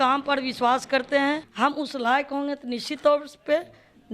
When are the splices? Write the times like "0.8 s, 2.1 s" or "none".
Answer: 1.5 s